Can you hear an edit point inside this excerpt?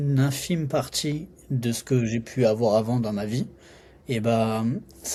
no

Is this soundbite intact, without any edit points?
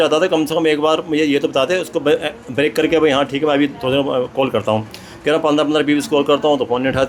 yes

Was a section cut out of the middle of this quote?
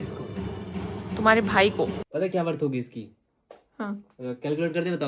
yes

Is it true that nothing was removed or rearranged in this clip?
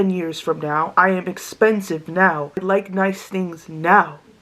no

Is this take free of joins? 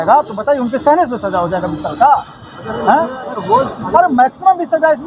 yes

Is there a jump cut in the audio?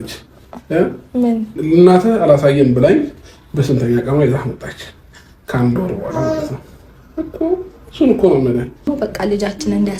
yes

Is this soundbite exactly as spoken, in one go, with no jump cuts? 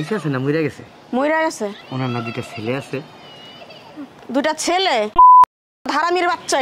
no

